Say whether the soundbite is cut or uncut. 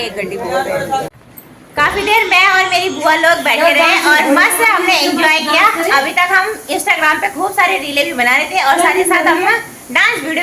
cut